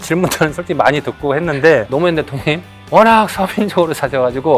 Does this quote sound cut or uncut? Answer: cut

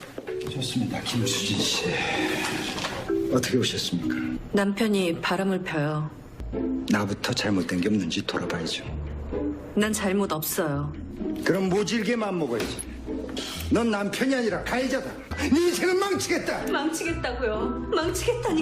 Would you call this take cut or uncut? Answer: cut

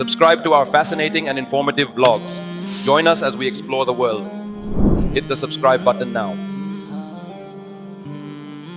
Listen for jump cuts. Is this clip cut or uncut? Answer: uncut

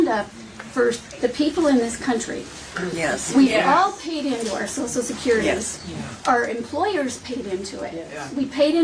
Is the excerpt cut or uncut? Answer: uncut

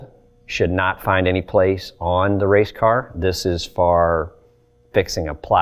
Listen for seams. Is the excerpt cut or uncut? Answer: uncut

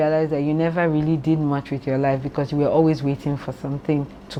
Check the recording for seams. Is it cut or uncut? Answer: uncut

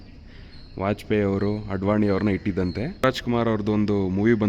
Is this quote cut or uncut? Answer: cut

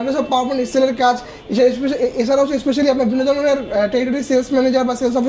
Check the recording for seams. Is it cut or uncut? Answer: uncut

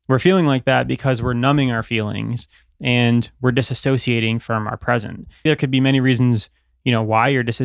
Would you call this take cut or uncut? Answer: cut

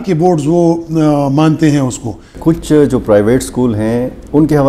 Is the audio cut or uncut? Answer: cut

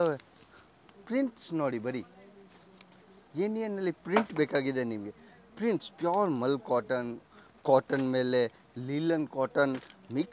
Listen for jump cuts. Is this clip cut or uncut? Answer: uncut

